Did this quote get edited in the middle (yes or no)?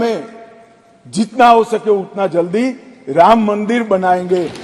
no